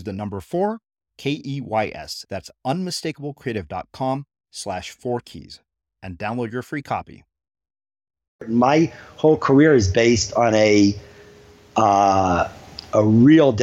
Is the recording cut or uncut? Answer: cut